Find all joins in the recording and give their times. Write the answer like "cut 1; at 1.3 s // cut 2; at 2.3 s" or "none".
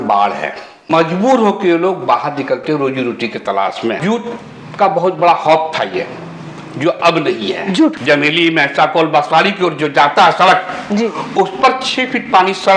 cut 1; at 1.0 s // cut 2; at 4.0 s // cut 3; at 8.0 s